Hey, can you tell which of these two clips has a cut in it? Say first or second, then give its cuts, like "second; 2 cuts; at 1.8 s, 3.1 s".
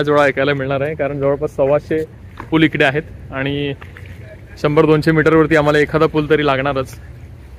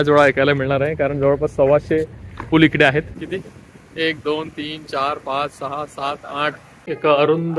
second; 2 cuts; at 3.2 s, 6.7 s